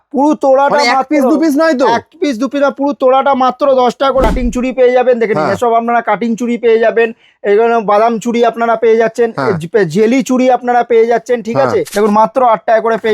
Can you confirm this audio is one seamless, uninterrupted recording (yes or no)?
no